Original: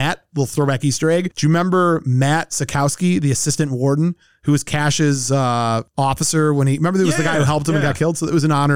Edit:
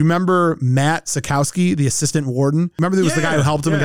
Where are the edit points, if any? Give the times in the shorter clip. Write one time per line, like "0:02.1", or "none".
0:02.8